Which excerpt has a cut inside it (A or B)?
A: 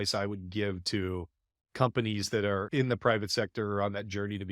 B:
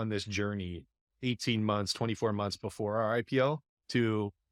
A